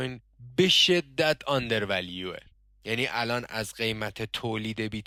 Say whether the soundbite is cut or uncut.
uncut